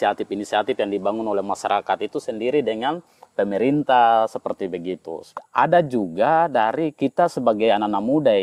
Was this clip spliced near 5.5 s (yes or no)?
yes